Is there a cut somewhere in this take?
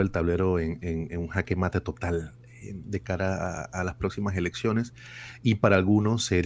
no; 0 cuts

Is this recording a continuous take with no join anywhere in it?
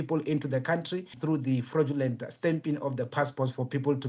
no; 1 cut; at 1.2 s

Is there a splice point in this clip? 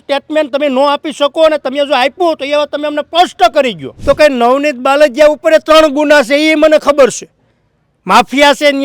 yes; 1 cut; at 3.9 s

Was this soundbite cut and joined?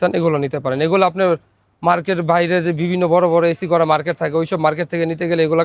no; 0 cuts

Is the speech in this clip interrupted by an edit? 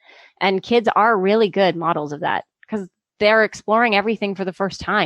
no; 0 cuts

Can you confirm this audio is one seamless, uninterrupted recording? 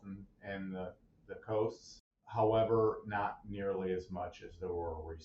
no; 1 cut; at 2.2 s

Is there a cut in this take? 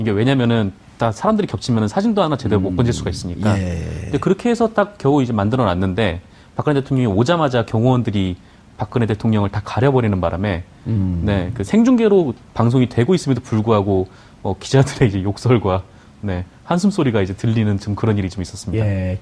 no; 0 cuts

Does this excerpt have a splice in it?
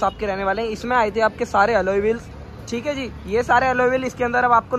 no; 0 cuts

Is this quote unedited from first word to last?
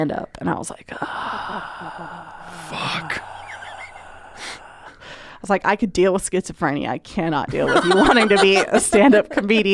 yes; 0 cuts

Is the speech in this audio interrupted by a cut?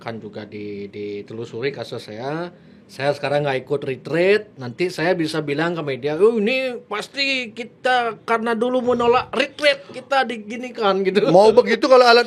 no; 0 cuts

